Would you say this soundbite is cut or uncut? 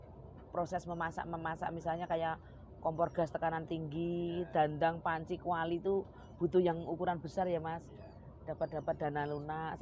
uncut